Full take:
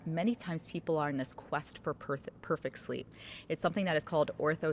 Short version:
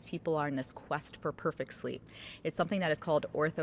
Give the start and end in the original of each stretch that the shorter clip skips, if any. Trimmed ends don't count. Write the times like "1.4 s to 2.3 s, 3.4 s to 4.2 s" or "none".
2.0 s to 2.4 s